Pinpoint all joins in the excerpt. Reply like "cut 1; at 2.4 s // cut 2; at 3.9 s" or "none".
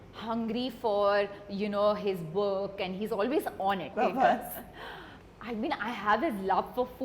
cut 1; at 3.9 s